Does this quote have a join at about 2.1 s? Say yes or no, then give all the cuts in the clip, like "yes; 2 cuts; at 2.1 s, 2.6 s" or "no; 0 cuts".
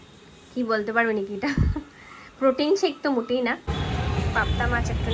no; 1 cut; at 3.7 s